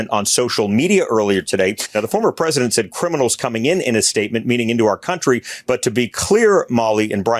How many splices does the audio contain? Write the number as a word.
one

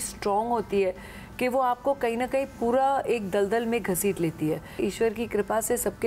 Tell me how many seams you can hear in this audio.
one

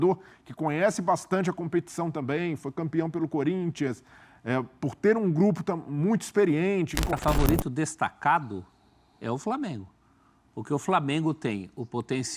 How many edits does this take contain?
one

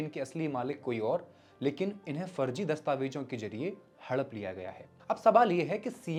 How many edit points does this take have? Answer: zero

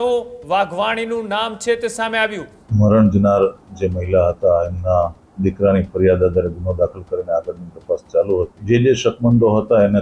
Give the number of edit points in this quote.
three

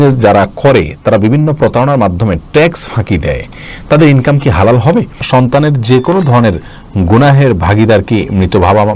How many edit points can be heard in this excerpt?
one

